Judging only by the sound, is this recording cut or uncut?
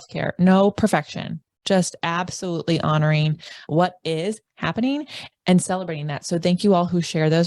cut